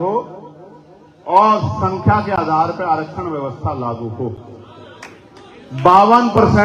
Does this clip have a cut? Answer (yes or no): no